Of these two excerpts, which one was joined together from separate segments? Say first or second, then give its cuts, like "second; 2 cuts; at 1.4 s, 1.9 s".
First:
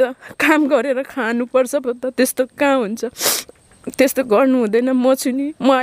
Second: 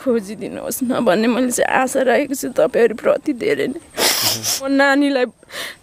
second; 1 cut; at 4.7 s